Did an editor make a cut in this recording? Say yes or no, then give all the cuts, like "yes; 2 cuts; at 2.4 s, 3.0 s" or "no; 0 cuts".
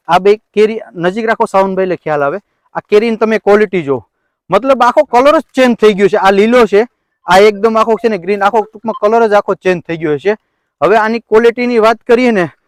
no; 0 cuts